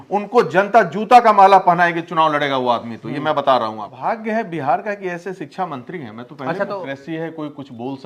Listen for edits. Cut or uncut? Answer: cut